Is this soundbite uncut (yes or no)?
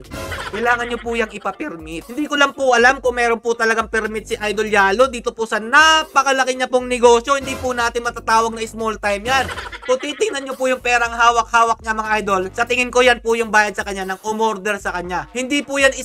yes